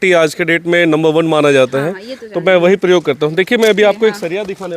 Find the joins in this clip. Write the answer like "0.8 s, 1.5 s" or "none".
none